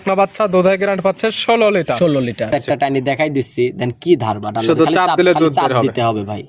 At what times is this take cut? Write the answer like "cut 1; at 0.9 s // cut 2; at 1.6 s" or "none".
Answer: cut 1; at 2.5 s